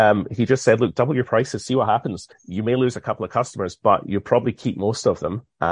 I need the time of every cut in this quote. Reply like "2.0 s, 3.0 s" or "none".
2.4 s

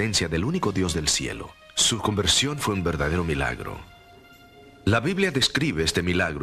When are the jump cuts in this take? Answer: none

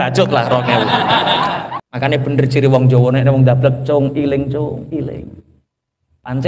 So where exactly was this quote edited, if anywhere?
1.8 s

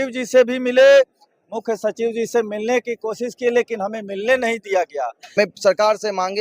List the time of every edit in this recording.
5.4 s

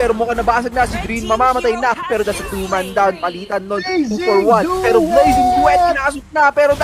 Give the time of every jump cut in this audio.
2.0 s

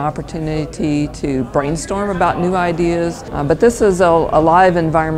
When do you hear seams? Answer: 3.3 s

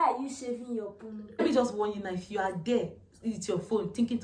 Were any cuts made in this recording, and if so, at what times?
1.4 s

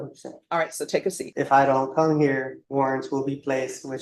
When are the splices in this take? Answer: 1.2 s, 2.6 s

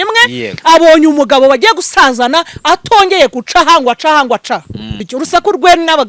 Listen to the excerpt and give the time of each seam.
5.1 s

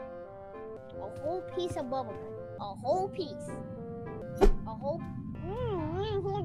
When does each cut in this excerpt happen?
0.8 s, 2.5 s, 4.2 s, 5.3 s

